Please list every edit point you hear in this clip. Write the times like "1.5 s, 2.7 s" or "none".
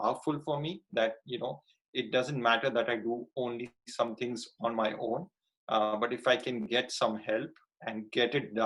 none